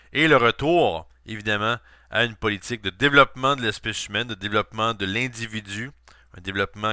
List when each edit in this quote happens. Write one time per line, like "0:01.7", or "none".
0:05.1